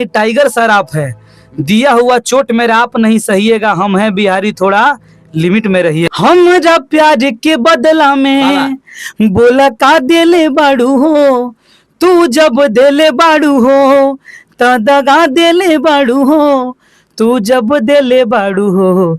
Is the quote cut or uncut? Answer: cut